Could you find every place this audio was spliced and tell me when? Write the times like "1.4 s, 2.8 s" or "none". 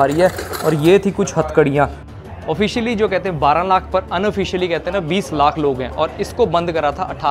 2.0 s